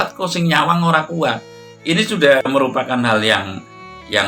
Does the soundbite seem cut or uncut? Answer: cut